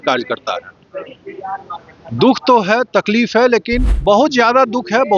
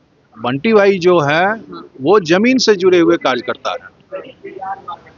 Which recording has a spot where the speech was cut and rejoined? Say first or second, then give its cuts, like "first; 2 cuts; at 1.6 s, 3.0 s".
first; 1 cut; at 3.9 s